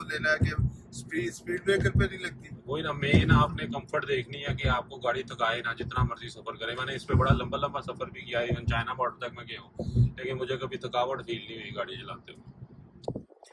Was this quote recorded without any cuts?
yes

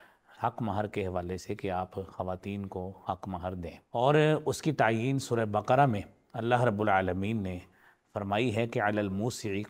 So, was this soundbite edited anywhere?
yes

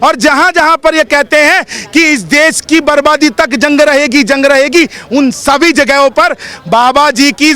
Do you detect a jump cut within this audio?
no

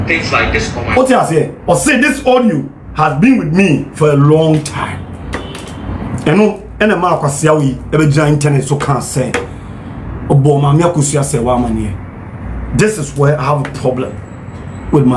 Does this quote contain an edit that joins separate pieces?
no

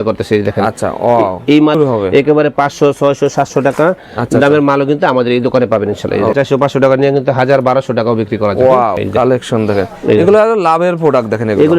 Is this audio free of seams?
no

